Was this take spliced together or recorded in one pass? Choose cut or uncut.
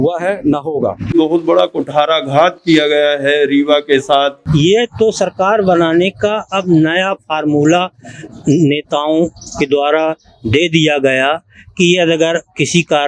cut